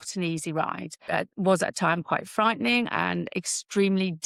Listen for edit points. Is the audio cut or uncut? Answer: uncut